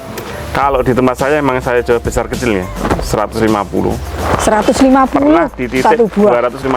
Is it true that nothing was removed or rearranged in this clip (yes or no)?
yes